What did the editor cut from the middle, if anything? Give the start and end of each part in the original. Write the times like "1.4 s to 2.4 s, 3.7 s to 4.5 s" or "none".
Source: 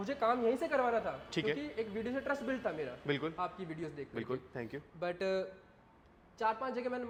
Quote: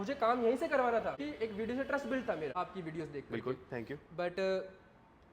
1.2 s to 1.6 s, 2.9 s to 3.4 s